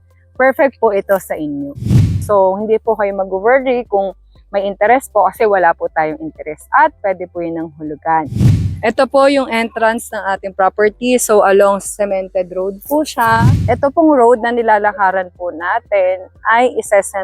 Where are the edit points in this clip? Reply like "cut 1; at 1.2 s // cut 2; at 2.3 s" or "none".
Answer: cut 1; at 1.8 s // cut 2; at 8.3 s // cut 3; at 13.4 s